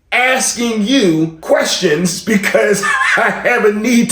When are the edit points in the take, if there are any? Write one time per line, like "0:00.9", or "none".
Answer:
0:01.4